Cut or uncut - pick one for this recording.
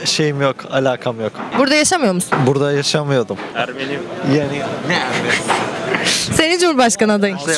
uncut